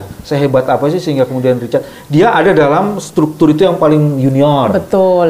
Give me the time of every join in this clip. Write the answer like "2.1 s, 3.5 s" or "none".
none